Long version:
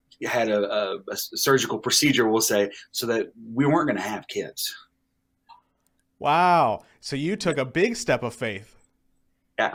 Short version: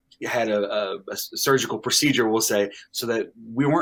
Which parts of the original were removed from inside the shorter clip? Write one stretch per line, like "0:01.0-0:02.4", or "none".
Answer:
none